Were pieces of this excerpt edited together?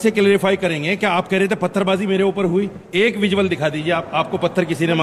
no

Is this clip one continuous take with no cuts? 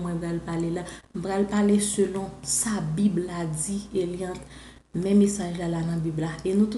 yes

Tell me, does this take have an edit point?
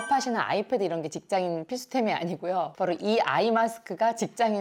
no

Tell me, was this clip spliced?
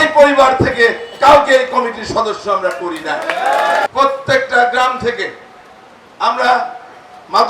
yes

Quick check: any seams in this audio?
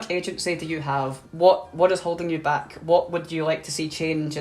yes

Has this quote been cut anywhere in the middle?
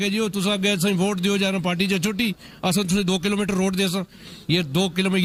no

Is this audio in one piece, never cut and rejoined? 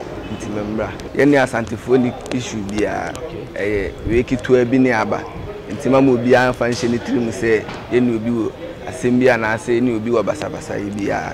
no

